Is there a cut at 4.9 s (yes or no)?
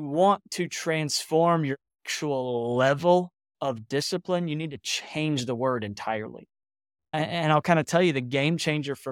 no